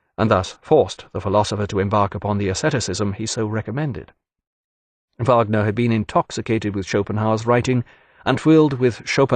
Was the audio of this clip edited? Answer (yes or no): no